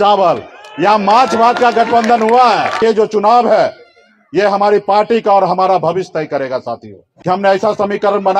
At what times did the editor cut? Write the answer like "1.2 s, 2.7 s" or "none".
2.8 s, 7.0 s